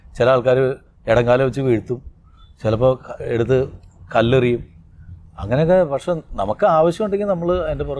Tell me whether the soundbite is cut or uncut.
uncut